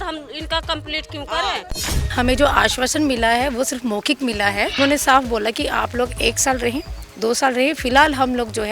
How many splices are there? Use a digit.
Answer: 2